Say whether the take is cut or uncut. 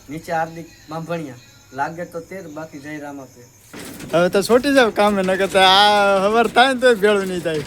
uncut